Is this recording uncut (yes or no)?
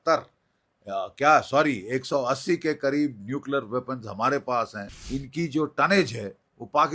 no